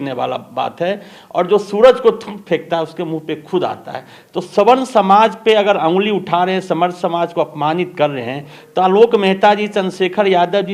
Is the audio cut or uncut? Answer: uncut